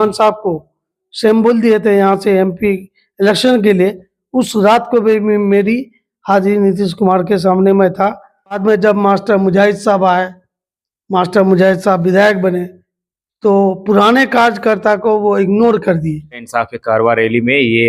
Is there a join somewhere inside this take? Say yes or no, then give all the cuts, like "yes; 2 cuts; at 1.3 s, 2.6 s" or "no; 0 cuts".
yes; 2 cuts; at 8.6 s, 16.5 s